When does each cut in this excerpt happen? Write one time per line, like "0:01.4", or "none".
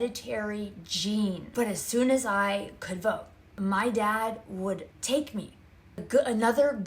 0:01.4